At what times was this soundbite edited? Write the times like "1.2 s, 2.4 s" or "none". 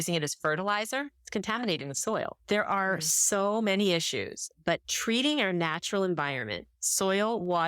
4.9 s